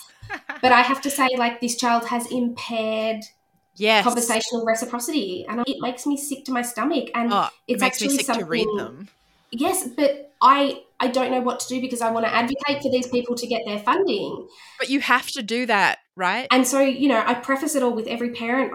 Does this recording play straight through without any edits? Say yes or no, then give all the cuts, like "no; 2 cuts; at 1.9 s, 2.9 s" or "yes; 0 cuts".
yes; 0 cuts